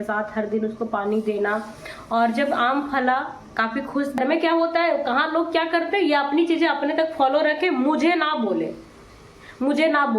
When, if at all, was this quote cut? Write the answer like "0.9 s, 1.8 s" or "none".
4.2 s